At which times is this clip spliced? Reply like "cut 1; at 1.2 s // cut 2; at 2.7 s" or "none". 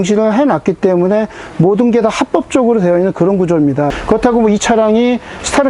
cut 1; at 3.9 s